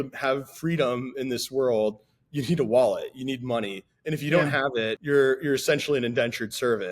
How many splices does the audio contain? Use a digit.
1